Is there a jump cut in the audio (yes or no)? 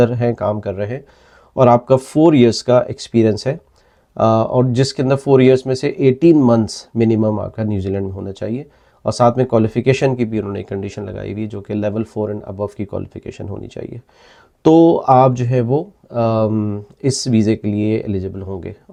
no